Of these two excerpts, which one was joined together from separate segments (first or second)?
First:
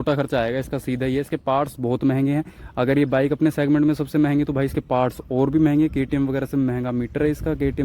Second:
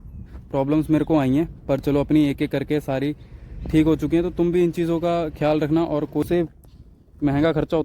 second